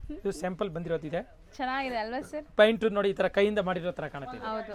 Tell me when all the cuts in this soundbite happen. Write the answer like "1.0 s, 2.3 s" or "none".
none